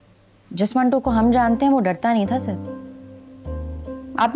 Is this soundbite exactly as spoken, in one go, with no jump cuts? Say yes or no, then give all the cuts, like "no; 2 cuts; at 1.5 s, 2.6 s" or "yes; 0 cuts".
yes; 0 cuts